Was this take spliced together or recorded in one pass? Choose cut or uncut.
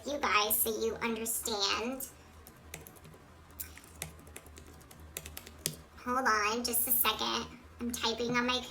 uncut